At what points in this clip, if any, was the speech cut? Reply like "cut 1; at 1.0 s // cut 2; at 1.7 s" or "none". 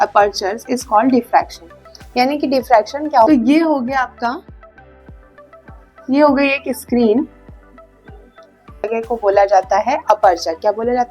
cut 1; at 3.3 s // cut 2; at 8.9 s